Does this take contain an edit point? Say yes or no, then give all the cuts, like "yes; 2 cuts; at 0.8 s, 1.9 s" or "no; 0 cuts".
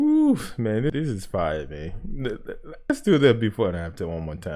yes; 2 cuts; at 0.9 s, 2.9 s